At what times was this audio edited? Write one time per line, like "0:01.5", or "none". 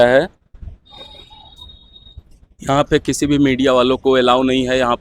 none